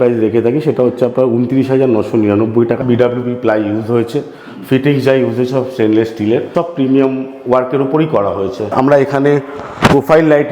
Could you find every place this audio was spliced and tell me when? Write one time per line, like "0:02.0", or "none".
0:02.8
0:06.5
0:08.7

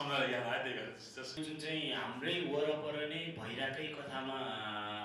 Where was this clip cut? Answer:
0:01.4

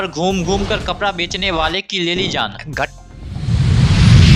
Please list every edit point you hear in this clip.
0:02.9

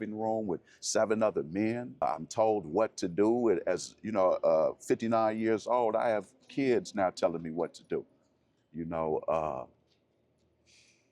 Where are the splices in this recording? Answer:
0:02.0

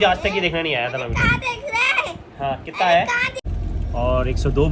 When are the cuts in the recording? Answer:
0:03.3

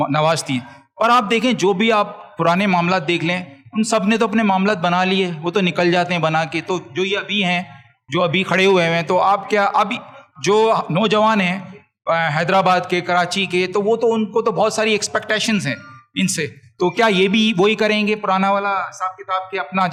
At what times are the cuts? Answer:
none

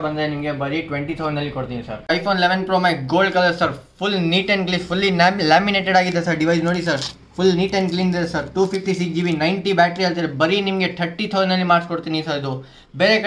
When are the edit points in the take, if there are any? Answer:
0:02.1

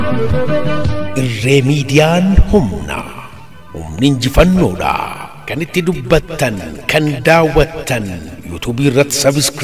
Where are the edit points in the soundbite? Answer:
0:00.9

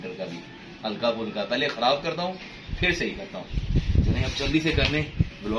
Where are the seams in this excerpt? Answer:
none

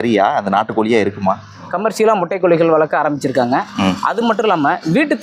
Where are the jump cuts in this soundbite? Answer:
0:01.8

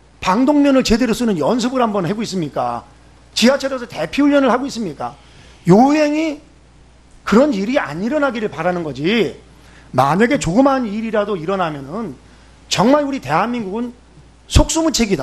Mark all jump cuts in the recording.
0:03.8

